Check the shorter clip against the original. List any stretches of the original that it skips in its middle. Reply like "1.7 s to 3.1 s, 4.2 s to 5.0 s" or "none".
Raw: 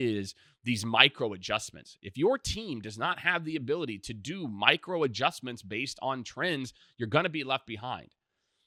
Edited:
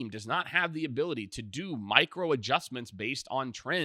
none

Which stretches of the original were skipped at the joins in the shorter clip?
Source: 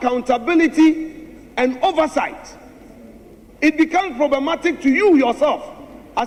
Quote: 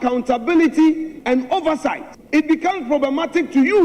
1.1 s to 1.4 s, 2.4 s to 3.4 s

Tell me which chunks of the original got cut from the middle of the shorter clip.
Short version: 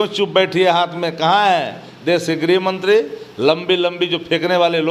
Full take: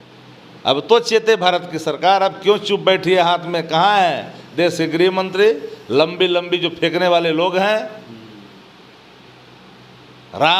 none

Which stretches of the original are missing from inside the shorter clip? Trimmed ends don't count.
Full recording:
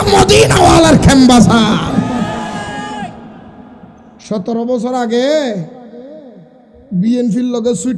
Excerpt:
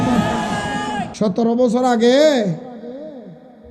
3.1 s to 4.2 s

